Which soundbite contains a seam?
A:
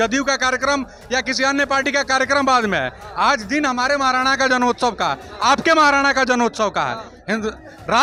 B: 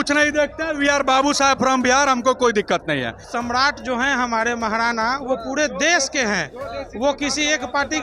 B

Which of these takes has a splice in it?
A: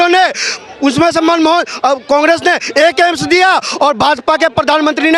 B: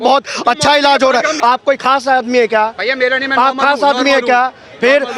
B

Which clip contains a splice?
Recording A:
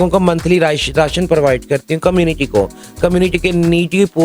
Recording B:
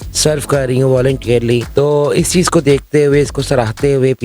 B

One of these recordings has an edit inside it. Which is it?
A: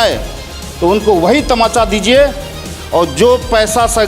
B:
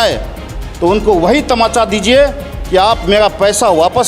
A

